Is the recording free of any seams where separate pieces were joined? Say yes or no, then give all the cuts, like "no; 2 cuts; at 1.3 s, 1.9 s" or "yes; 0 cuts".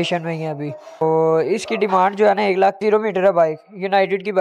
no; 2 cuts; at 1.0 s, 2.8 s